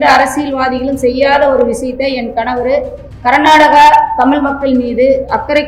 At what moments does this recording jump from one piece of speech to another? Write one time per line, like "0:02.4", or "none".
none